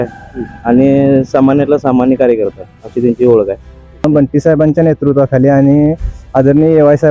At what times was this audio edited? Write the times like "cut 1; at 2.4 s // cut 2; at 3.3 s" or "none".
cut 1; at 4.0 s

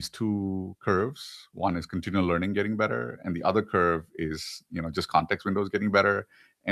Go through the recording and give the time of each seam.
none

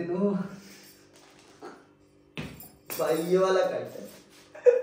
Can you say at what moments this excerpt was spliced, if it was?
none

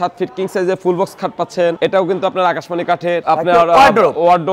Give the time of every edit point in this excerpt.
none

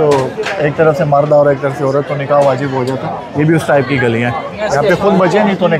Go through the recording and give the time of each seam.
none

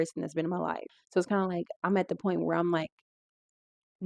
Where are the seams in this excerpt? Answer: cut 1; at 1.0 s

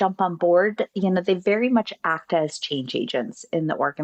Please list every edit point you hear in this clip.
none

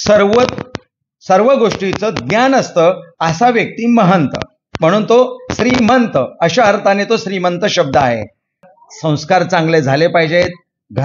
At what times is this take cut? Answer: cut 1; at 8.6 s

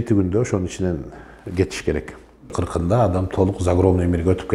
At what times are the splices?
cut 1; at 2.4 s

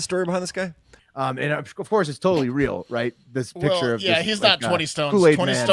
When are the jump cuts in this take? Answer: cut 1; at 1.0 s

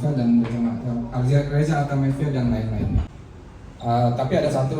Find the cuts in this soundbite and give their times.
cut 1; at 3.1 s

